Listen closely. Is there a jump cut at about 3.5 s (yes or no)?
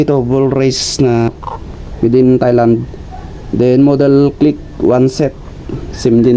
no